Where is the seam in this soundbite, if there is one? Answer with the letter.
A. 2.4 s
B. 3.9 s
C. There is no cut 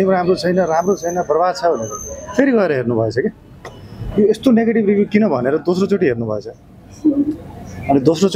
C